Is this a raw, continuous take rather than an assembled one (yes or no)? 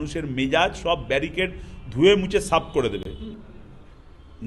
no